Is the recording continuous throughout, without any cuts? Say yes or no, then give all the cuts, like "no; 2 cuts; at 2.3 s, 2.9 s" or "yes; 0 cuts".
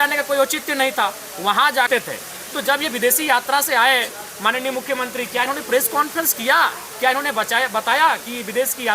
no; 1 cut; at 1.9 s